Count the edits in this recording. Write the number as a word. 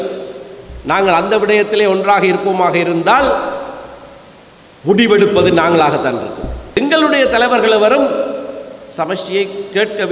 one